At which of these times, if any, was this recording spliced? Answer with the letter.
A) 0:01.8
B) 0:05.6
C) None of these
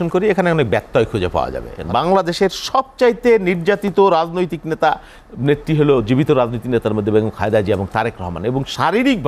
A